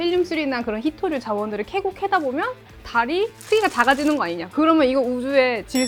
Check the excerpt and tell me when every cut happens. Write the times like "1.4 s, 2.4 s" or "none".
none

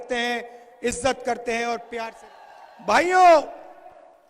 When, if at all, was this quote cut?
2.1 s

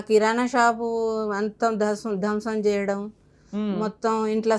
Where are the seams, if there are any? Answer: none

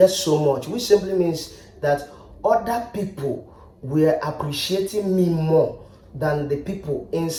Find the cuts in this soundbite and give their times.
none

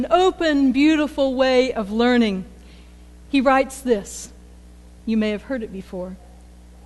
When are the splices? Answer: 4.0 s

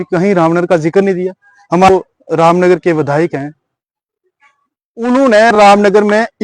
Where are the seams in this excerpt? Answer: 1.9 s

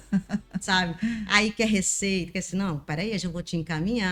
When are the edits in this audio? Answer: none

